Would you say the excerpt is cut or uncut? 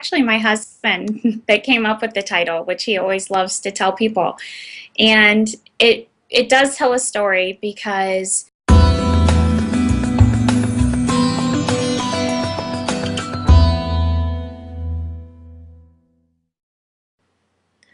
uncut